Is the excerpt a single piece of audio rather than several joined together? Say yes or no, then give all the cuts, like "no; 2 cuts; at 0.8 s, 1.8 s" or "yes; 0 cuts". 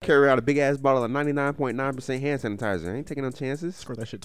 yes; 0 cuts